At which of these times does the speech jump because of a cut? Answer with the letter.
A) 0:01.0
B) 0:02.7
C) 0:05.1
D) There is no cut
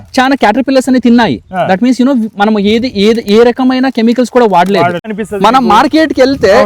C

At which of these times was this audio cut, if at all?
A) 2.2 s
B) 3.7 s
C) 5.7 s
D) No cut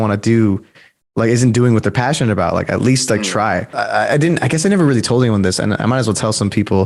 B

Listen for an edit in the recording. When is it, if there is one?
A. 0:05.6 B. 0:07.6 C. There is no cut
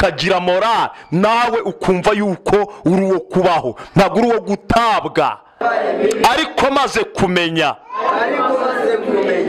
A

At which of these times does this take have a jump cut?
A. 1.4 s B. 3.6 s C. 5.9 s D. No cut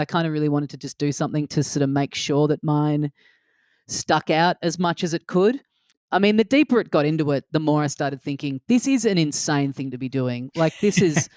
C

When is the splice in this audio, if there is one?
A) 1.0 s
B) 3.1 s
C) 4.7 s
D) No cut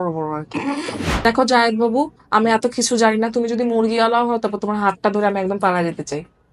A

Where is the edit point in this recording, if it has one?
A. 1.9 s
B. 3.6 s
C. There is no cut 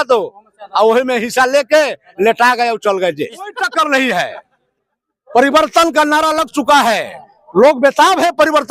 B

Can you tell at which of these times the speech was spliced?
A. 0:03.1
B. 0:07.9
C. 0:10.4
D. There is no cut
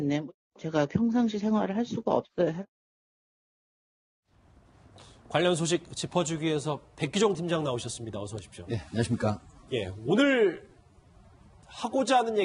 D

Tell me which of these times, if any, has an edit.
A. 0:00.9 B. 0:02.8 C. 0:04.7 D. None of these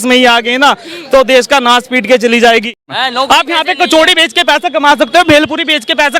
B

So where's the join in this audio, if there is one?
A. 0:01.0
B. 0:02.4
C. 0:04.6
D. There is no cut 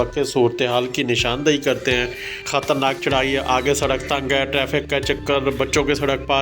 B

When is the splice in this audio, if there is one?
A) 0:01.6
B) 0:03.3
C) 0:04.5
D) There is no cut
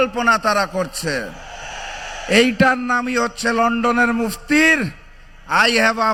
D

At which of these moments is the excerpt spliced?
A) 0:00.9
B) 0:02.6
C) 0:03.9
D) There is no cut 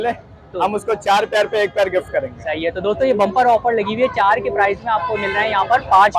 D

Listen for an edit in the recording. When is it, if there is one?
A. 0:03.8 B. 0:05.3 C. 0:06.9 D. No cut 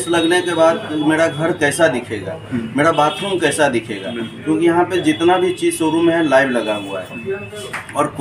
D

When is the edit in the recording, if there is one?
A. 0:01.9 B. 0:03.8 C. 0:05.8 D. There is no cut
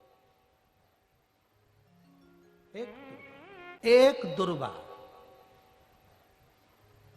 B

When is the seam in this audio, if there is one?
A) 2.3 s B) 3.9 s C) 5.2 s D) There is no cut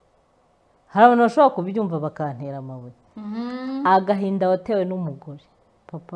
D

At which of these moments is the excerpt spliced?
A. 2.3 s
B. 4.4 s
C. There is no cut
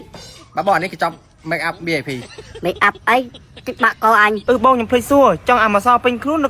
B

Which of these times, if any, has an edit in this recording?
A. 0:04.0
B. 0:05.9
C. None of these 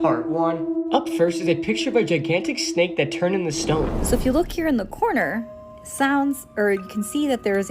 A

